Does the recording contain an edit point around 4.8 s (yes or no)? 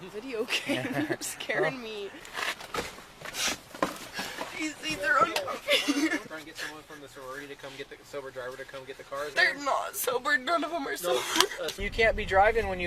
no